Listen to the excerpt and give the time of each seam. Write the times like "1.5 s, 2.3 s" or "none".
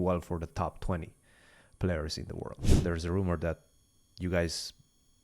2.6 s